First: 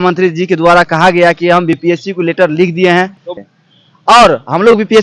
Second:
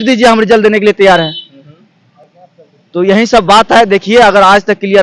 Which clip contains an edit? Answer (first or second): first